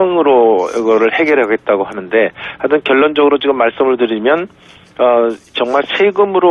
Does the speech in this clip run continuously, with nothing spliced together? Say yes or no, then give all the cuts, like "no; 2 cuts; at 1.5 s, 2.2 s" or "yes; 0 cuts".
no; 1 cut; at 1.9 s